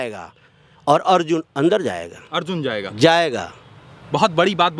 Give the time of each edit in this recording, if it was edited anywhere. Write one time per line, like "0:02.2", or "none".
none